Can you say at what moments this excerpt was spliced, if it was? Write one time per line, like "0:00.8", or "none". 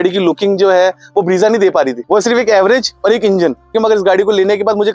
0:02.0
0:03.7